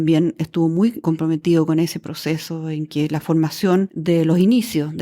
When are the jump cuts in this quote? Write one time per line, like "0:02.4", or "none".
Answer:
0:01.0